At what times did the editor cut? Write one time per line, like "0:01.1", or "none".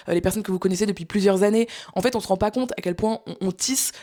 none